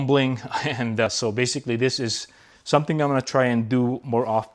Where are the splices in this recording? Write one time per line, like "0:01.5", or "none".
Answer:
0:01.1